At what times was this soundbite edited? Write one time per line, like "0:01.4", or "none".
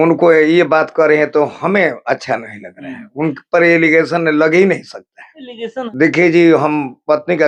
0:05.8